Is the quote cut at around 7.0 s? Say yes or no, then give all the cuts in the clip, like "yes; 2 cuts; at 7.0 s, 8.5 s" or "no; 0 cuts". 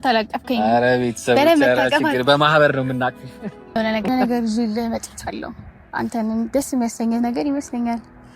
no; 1 cut; at 3.8 s